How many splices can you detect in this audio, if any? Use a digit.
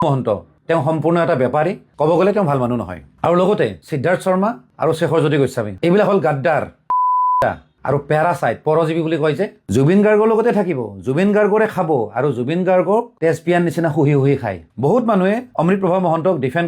3